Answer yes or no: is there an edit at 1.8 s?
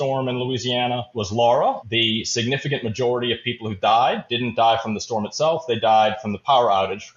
yes